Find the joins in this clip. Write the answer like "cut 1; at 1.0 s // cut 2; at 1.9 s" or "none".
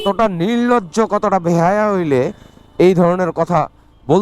none